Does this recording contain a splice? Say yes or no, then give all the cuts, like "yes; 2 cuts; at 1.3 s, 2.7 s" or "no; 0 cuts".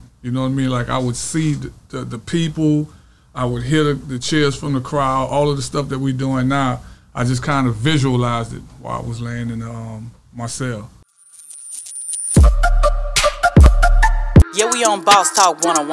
yes; 1 cut; at 11.0 s